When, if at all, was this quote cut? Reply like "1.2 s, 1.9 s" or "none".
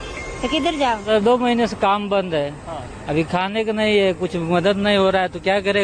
1.1 s